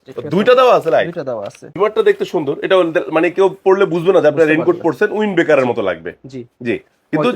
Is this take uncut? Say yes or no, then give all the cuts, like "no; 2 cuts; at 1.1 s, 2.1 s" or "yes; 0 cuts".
no; 1 cut; at 1.7 s